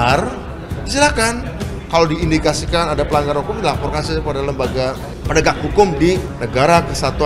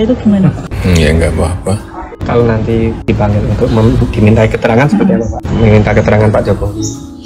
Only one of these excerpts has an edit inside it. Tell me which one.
first; 2 cuts; at 5.1 s, 6.3 s

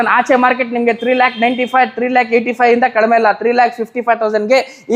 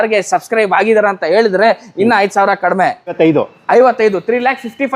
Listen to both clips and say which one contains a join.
second; 1 cut; at 3.1 s

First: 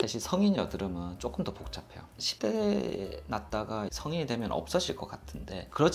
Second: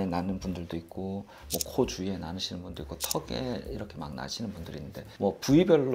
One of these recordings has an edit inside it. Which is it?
second; 1 cut; at 5.0 s

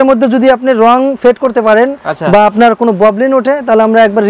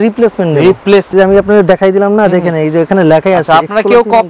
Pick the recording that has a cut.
second; 1 cut; at 1.1 s

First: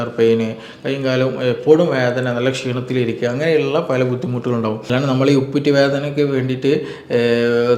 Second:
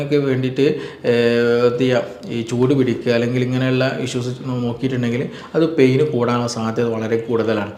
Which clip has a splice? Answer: first; 1 cut; at 4.9 s

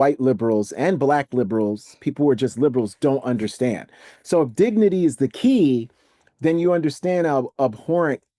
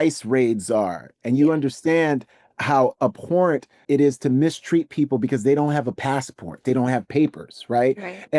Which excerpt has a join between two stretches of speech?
second; 1 cut; at 3.8 s

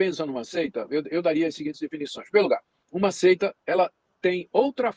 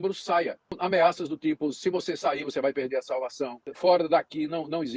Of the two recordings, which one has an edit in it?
second; 2 cuts; at 0.8 s, 3.6 s

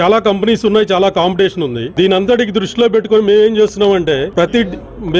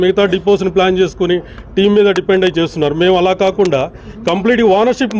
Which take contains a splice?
first; 2 cuts; at 1.8 s, 4.3 s

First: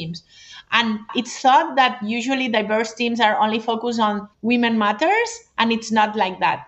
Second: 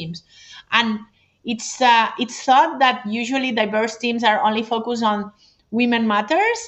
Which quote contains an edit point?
first; 2 cuts; at 1.1 s, 4.3 s

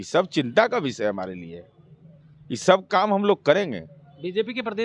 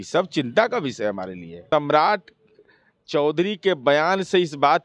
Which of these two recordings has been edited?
second; 1 cut; at 1.7 s

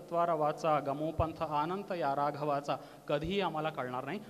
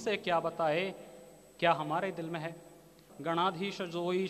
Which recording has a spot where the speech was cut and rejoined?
second; 1 cut; at 3.1 s

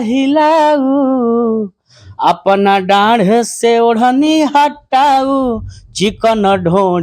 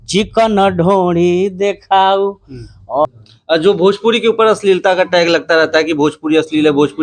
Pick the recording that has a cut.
second; 1 cut; at 3.0 s

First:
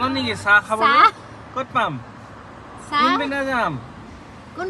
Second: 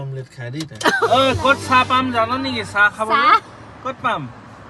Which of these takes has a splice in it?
second; 1 cut; at 1.0 s

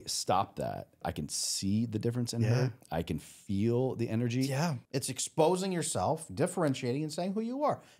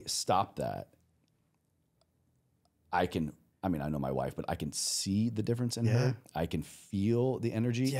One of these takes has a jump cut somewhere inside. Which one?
first; 2 cuts; at 1.0 s, 4.8 s

